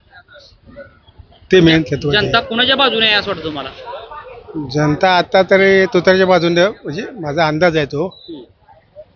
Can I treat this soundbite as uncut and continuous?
yes; 0 cuts

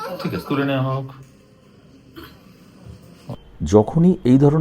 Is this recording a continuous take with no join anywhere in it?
no; 1 cut; at 3.3 s

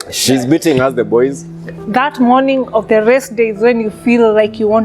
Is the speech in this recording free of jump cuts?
no; 1 cut; at 1.8 s

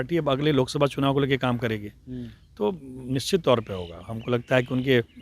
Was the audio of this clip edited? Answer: no; 0 cuts

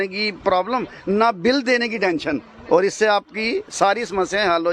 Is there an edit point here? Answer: no; 0 cuts

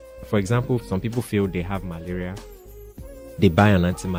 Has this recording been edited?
no; 0 cuts

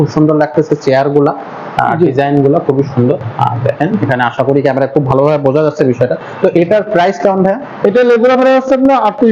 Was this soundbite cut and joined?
no; 0 cuts

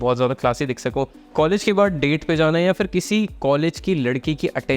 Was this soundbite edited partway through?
yes; 1 cut; at 1.2 s

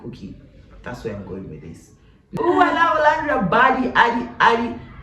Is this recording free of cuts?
no; 1 cut; at 2.1 s

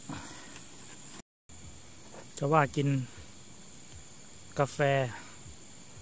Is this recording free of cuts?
no; 1 cut; at 1.2 s

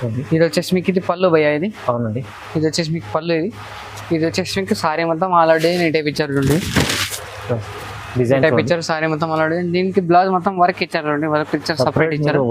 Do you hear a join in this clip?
no; 0 cuts

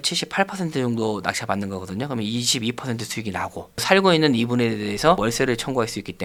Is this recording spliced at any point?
no; 0 cuts

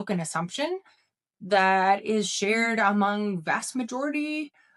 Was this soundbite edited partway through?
no; 0 cuts

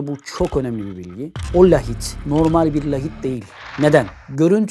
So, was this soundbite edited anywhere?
yes; 1 cut; at 1.3 s

